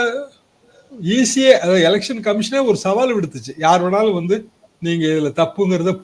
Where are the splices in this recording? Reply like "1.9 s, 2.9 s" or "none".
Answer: none